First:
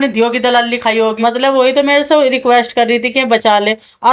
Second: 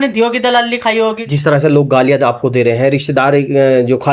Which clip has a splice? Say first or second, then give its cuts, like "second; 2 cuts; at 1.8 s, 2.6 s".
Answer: first; 1 cut; at 1.2 s